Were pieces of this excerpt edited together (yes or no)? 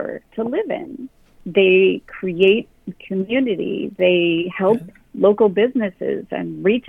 no